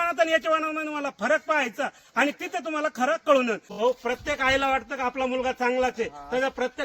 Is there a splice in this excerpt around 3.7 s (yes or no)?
yes